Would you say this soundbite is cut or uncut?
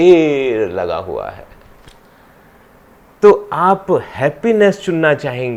uncut